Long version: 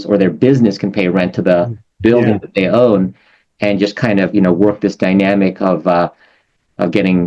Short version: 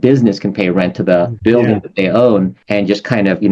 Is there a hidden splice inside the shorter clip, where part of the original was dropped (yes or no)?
yes